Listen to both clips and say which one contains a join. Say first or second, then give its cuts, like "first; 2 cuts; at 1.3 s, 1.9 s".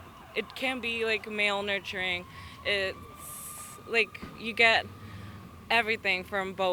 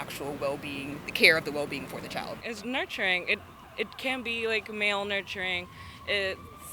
second; 1 cut; at 2.4 s